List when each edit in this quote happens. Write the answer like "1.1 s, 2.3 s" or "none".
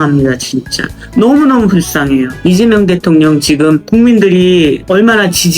3.8 s